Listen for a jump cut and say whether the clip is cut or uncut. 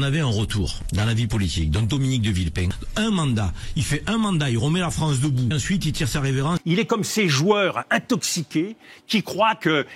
cut